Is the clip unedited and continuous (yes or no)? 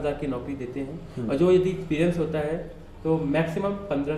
yes